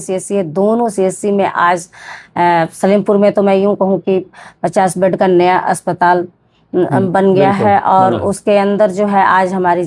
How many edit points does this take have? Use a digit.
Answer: 0